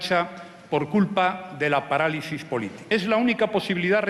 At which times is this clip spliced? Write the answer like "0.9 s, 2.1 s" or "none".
2.8 s